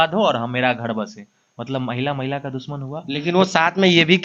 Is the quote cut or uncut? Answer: uncut